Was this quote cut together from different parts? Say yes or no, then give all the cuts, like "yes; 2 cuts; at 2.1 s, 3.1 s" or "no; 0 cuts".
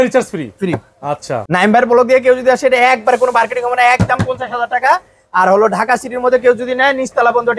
no; 0 cuts